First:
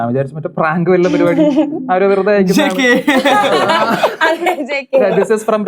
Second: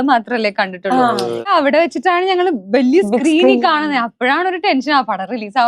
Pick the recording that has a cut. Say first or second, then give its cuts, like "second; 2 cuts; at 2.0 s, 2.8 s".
second; 1 cut; at 1.5 s